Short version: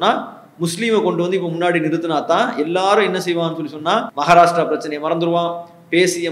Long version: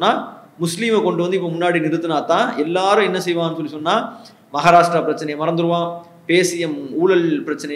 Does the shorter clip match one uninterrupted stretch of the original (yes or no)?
no